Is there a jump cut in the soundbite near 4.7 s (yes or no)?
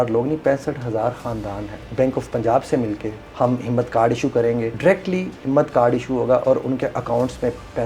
yes